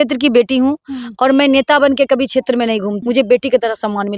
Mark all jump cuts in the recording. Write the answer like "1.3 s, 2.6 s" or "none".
2.9 s